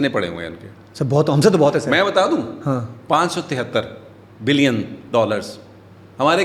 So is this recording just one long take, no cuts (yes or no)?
yes